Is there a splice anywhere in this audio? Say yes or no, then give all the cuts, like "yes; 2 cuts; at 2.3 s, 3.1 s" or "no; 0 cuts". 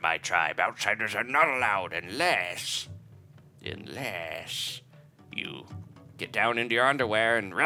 no; 0 cuts